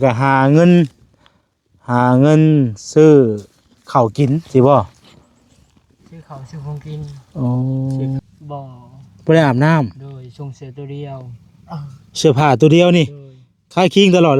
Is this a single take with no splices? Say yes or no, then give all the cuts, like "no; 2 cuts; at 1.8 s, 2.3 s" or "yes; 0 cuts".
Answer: no; 1 cut; at 8.2 s